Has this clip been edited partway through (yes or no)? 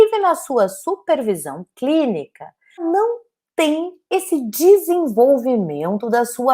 yes